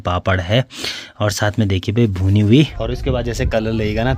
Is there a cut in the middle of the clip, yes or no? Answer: yes